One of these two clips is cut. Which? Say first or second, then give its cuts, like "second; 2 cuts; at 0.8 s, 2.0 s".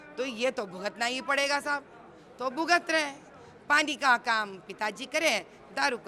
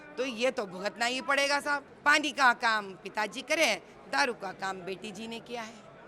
second; 1 cut; at 1.9 s